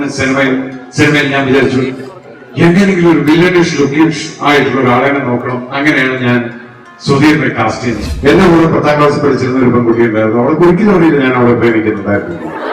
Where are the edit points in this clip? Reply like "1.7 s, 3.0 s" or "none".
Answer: 8.0 s